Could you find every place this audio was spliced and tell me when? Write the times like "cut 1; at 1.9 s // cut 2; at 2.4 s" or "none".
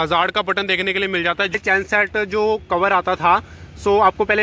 cut 1; at 1.5 s